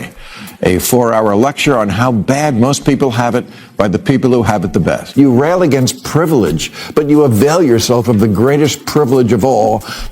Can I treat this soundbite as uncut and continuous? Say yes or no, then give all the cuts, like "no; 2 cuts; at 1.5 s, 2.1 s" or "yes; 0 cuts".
no; 1 cut; at 5.0 s